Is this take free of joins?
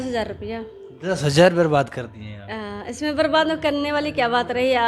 yes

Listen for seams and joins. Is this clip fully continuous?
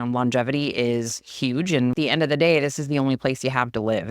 no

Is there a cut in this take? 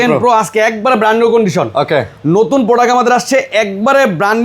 no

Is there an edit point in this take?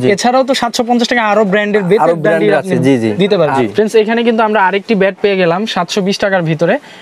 yes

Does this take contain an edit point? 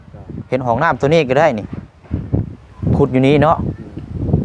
no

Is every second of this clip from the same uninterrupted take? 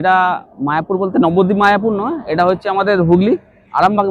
yes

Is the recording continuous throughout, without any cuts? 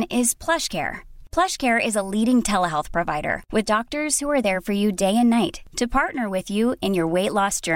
yes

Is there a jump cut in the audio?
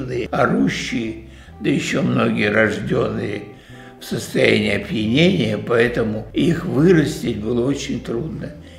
no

